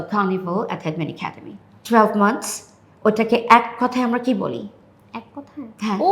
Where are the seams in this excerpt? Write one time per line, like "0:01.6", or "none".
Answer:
0:01.5